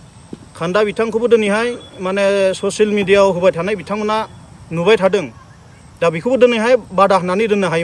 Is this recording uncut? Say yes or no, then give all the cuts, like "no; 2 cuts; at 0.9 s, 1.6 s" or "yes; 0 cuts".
yes; 0 cuts